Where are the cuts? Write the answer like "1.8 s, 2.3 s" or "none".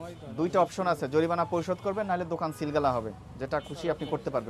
none